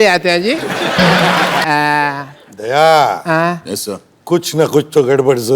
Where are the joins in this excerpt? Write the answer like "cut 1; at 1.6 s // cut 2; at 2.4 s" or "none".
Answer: cut 1; at 1.6 s